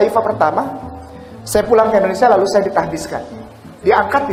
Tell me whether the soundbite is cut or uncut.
uncut